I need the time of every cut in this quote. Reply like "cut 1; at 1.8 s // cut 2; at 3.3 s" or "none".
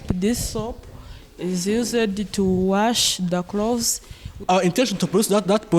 cut 1; at 4.3 s